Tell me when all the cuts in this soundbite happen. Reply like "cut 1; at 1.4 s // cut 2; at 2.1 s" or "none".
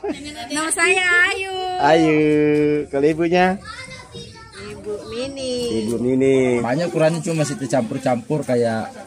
cut 1; at 6.6 s